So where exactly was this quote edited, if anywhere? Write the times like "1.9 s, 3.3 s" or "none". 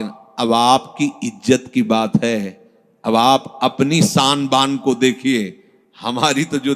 none